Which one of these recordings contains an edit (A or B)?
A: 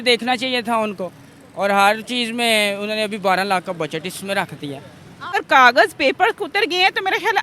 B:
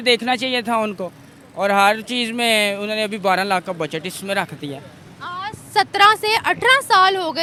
A